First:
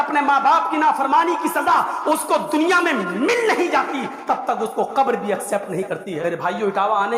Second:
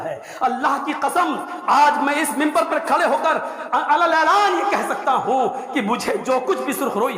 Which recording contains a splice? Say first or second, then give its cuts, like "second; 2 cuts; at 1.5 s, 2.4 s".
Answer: first; 1 cut; at 6.1 s